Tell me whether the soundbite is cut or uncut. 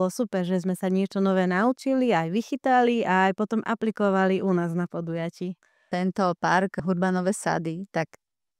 cut